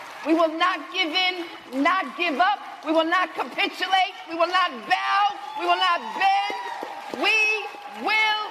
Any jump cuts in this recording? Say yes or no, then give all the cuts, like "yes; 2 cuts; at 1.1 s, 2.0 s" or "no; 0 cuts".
no; 0 cuts